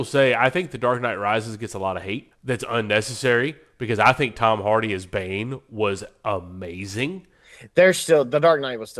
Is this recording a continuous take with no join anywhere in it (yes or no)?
no